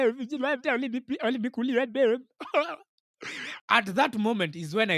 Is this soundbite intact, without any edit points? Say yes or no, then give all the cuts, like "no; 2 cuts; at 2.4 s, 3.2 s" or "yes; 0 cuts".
no; 1 cut; at 3.5 s